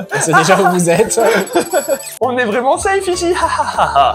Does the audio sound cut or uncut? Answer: uncut